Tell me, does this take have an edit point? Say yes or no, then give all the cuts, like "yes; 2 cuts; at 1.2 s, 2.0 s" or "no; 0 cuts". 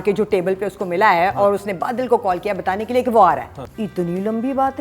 yes; 1 cut; at 3.6 s